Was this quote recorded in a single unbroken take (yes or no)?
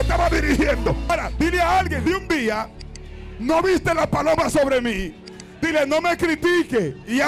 no